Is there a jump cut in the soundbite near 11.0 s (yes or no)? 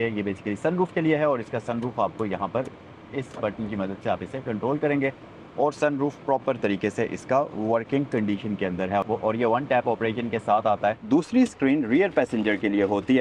yes